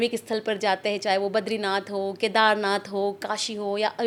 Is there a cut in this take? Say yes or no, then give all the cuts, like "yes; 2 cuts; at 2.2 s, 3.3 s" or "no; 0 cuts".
no; 0 cuts